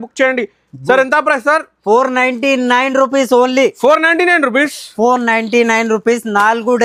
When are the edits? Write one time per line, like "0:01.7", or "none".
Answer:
none